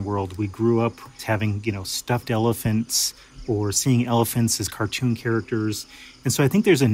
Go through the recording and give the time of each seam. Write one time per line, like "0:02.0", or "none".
0:01.2